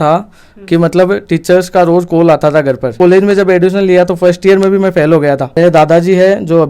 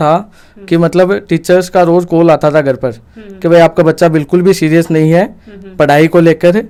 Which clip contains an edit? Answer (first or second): first